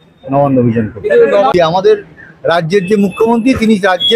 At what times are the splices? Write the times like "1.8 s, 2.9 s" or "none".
1.5 s